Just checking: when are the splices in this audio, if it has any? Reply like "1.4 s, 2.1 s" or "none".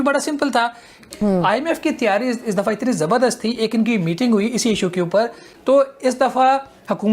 0.9 s, 5.4 s